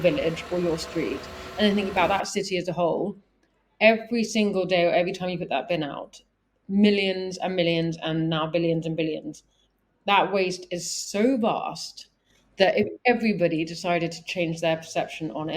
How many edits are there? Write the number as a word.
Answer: zero